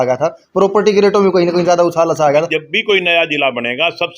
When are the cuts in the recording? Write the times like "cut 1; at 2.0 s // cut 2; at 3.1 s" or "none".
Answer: cut 1; at 2.3 s